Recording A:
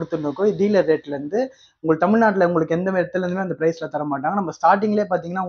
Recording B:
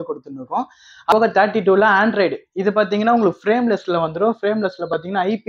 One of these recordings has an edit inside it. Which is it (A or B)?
B